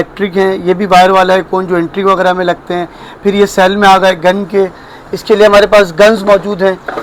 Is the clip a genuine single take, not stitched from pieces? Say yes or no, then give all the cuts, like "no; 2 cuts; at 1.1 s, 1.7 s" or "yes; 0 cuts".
yes; 0 cuts